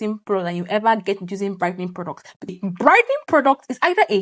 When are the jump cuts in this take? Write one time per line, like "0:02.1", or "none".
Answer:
0:02.5